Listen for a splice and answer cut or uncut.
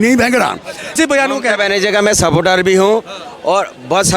cut